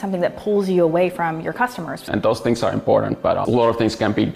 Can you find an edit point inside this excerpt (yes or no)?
yes